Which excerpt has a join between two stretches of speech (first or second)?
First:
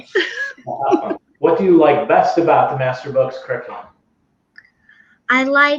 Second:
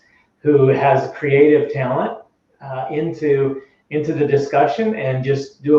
first